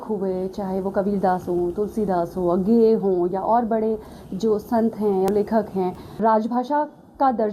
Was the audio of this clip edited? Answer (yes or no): yes